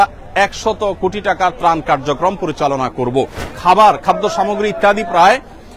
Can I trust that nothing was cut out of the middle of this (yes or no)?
no